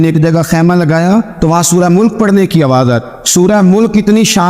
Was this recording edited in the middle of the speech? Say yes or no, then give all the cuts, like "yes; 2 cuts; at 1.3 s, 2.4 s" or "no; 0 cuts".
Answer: yes; 2 cuts; at 1.3 s, 3.1 s